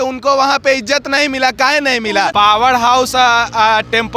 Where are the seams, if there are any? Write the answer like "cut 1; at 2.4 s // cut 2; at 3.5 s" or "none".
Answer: cut 1; at 2.3 s

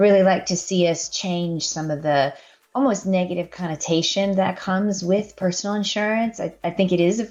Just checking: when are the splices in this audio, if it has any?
none

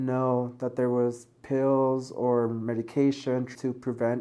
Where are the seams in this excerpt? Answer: none

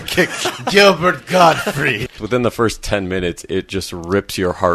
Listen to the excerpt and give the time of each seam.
cut 1; at 2.1 s

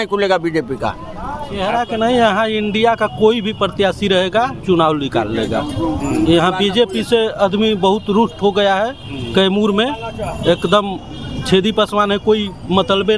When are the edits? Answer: cut 1; at 1.5 s

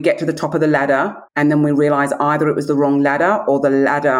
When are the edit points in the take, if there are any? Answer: cut 1; at 1.2 s

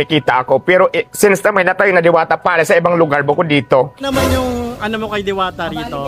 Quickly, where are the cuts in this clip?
cut 1; at 4.0 s

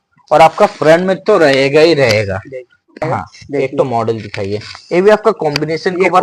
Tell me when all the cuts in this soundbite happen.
cut 1; at 3.0 s

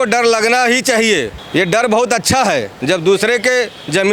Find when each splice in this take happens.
cut 1; at 1.4 s // cut 2; at 2.7 s

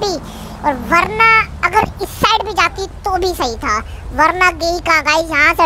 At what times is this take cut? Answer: none

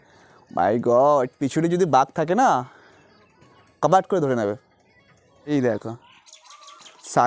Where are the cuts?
cut 1; at 5.5 s

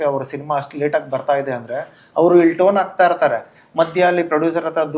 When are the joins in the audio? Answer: none

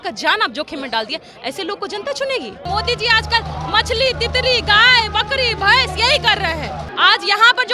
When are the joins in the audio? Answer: cut 1; at 2.6 s // cut 2; at 6.8 s

